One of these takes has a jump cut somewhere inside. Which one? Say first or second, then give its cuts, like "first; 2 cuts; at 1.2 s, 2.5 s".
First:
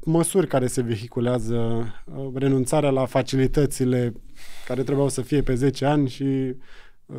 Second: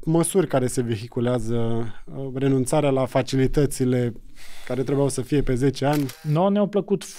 second; 1 cut; at 6.1 s